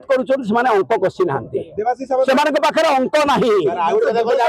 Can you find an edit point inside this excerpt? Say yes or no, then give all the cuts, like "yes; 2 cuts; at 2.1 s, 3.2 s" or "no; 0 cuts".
no; 0 cuts